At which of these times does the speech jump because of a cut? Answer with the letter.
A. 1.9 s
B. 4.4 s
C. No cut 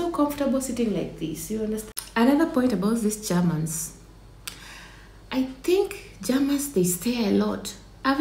A